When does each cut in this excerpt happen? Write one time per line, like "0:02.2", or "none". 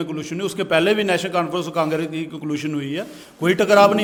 none